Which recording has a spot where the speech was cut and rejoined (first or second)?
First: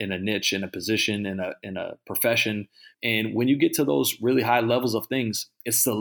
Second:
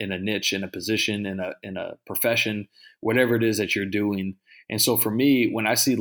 first